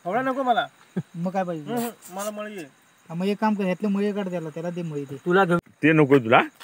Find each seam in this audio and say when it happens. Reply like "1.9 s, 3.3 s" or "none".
5.6 s